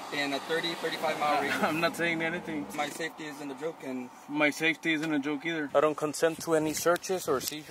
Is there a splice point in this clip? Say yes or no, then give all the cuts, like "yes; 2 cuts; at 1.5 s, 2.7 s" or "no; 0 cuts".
yes; 2 cuts; at 2.7 s, 5.6 s